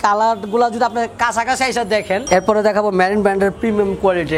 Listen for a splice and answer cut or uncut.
cut